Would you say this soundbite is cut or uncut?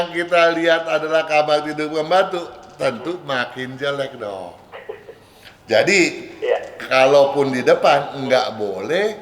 uncut